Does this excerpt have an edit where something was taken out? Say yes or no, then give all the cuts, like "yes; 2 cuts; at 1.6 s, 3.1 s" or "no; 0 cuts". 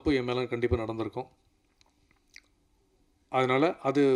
no; 0 cuts